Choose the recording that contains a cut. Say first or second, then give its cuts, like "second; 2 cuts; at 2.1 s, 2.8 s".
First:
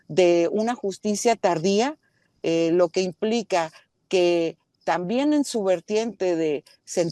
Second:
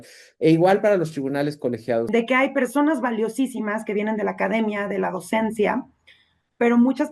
second; 1 cut; at 2.1 s